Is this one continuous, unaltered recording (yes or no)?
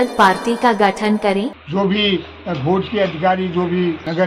no